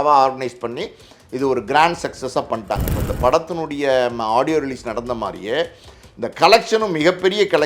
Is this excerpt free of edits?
no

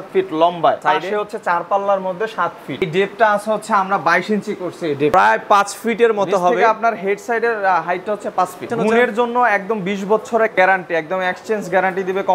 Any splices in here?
yes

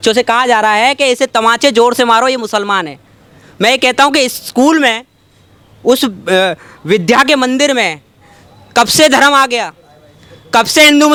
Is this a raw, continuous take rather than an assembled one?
yes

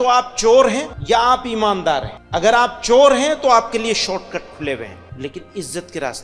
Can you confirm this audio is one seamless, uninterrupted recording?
no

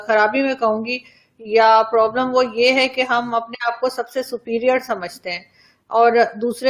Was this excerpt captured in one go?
yes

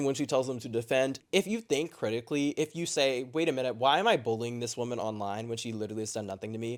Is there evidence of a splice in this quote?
no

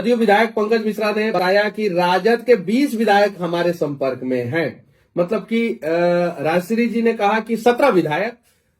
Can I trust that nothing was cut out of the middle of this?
no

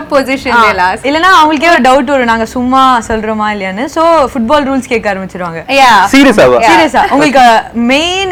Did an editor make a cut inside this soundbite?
no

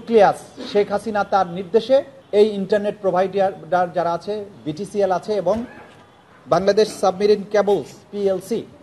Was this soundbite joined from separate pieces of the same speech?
yes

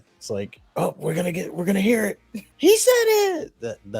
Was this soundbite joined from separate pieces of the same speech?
no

